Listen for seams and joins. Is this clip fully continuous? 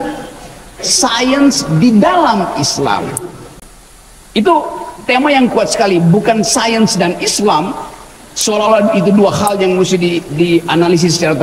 yes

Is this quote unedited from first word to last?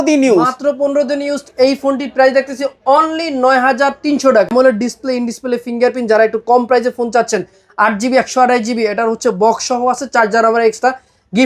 no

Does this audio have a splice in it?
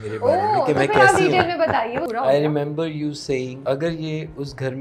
yes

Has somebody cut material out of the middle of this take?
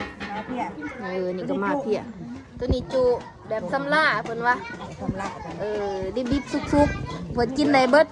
no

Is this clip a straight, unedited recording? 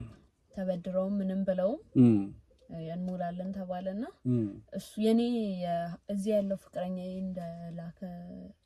yes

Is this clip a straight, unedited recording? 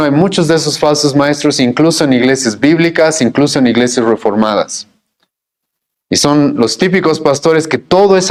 yes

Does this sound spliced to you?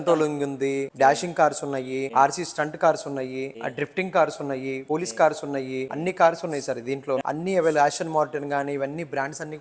yes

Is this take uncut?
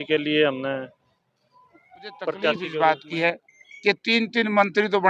no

